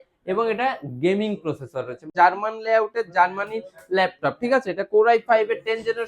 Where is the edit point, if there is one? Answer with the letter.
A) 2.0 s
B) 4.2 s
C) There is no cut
A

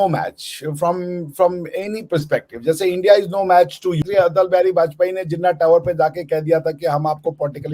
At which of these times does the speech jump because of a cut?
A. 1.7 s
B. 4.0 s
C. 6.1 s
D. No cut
B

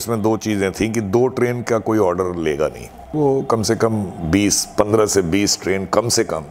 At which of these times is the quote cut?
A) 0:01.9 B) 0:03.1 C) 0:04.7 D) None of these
B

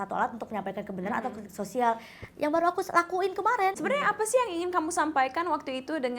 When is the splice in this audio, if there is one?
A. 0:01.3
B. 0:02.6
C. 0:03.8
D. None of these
C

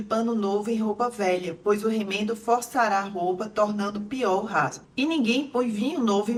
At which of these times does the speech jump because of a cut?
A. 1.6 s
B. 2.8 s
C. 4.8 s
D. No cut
D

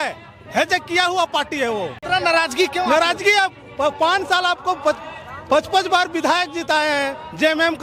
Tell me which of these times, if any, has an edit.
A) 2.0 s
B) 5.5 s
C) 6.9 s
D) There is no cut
A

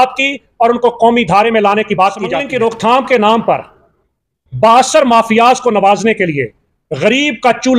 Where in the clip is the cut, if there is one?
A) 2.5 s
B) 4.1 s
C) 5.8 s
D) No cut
A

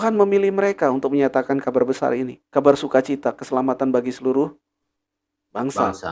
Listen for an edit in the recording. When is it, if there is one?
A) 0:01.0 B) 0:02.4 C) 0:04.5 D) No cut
B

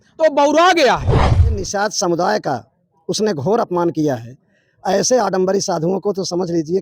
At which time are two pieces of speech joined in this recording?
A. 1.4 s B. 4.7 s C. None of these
A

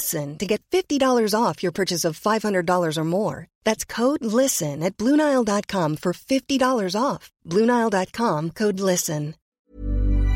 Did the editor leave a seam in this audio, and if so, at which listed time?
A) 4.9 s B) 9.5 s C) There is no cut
B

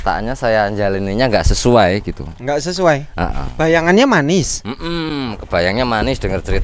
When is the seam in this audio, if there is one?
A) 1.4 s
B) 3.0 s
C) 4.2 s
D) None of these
D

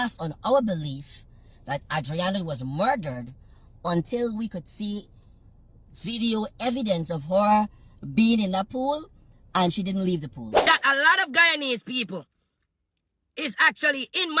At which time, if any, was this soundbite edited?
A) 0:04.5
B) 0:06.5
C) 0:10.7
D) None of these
C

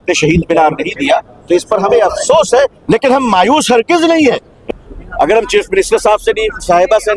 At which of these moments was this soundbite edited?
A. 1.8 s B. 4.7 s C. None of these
C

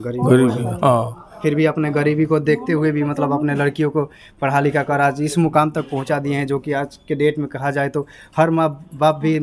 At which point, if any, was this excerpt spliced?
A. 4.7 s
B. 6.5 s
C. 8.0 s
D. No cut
D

